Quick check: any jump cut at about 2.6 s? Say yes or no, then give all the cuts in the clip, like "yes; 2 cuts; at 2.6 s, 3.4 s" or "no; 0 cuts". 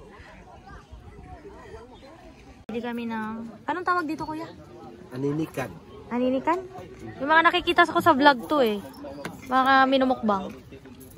yes; 1 cut; at 2.6 s